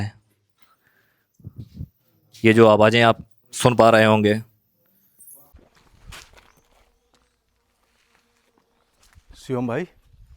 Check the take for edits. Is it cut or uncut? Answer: cut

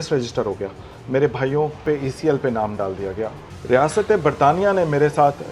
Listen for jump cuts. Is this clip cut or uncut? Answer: cut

